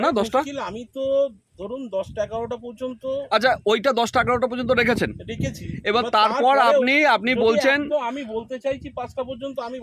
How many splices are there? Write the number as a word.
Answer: zero